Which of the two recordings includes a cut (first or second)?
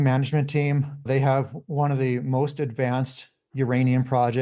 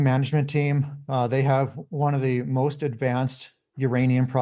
first